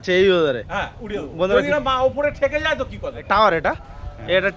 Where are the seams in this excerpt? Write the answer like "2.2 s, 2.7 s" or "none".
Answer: 3.2 s

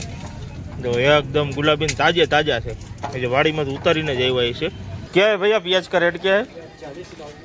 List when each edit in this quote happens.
4.9 s

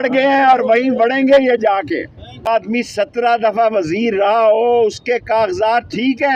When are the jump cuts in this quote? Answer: 2.5 s

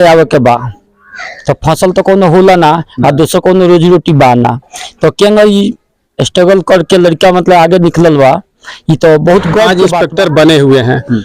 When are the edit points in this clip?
9.7 s

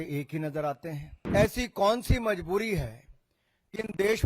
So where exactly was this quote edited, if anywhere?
1.1 s

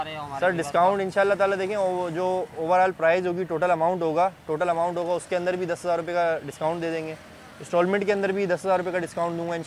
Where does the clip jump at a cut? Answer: none

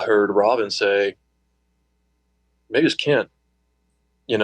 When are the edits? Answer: none

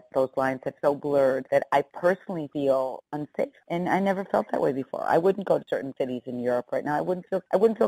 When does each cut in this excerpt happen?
5.7 s

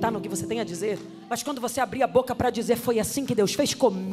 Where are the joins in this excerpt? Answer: 1.1 s

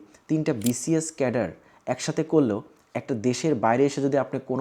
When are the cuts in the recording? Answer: none

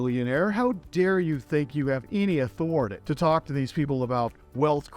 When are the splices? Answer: 3.0 s

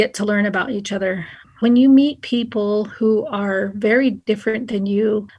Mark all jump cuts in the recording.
1.6 s

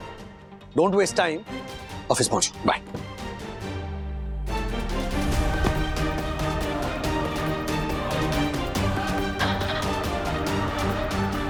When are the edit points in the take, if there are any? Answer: none

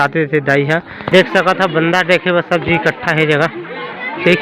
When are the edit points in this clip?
1.0 s

